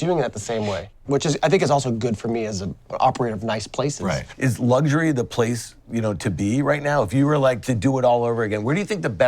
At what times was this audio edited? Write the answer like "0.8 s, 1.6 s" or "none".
0.9 s, 2.9 s, 4.3 s, 7.6 s